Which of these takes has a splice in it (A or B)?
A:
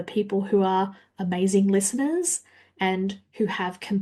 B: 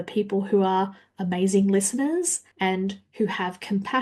B